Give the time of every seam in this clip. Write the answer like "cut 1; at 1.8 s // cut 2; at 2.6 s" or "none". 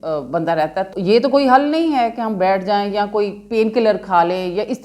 cut 1; at 0.9 s